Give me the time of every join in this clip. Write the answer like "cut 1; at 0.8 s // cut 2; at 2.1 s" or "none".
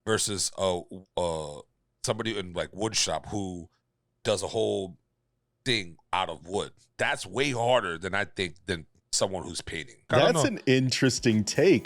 cut 1; at 10.1 s